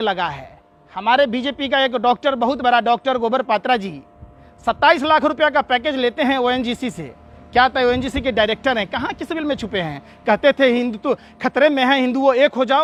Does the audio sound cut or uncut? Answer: uncut